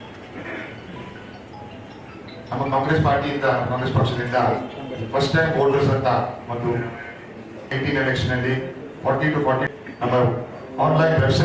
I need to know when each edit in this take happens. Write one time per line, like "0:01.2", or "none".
0:07.7
0:09.7